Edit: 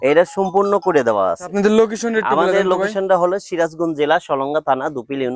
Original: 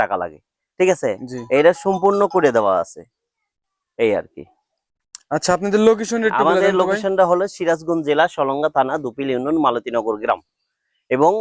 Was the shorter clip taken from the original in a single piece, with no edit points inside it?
no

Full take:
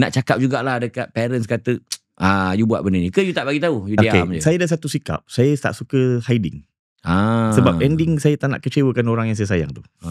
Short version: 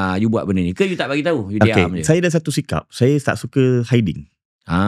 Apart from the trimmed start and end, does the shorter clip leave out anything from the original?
no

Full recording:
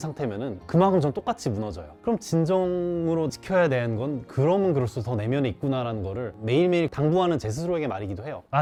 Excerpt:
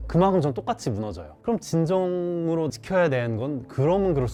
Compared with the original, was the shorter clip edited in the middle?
no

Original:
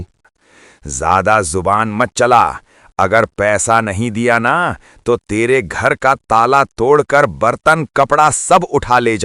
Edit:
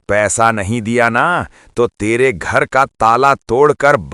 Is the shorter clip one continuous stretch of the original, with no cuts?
yes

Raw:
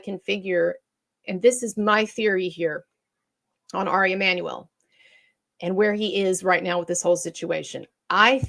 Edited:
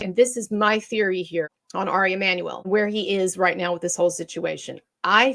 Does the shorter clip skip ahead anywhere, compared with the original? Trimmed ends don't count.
yes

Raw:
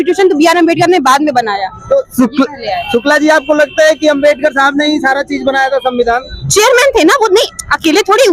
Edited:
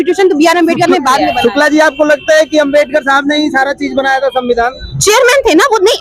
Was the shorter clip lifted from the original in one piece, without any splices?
no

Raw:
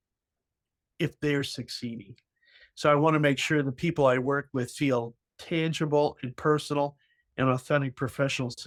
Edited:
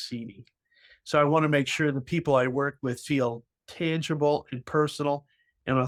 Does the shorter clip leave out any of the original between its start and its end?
no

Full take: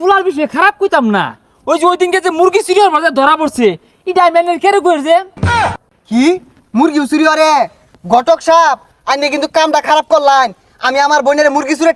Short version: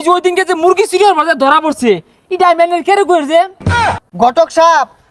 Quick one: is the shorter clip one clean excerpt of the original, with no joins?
no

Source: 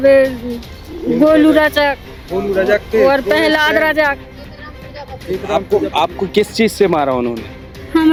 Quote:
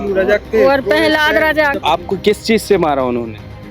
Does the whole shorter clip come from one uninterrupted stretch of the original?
no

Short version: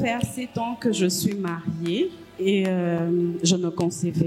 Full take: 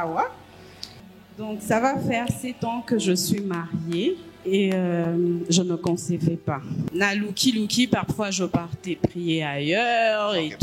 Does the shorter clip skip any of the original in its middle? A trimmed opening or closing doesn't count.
no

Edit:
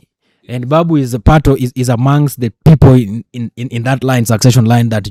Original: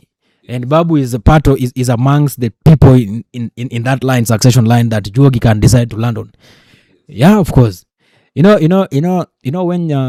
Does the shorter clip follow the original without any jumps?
yes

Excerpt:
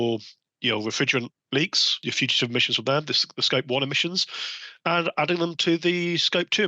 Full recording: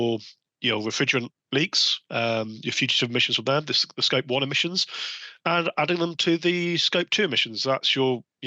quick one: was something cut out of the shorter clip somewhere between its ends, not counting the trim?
yes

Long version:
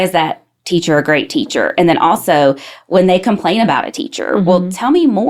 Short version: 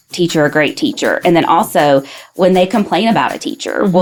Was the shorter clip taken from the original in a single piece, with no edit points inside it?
yes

